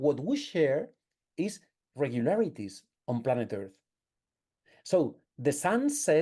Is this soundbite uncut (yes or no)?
yes